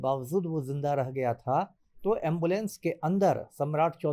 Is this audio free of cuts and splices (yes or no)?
yes